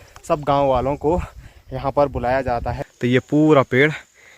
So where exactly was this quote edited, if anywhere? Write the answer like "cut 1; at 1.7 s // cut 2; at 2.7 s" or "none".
cut 1; at 2.8 s